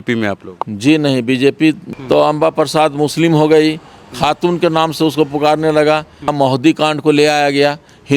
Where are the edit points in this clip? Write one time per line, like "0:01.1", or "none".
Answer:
0:01.9
0:06.3